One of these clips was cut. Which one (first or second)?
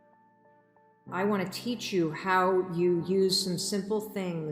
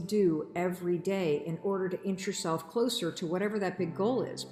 first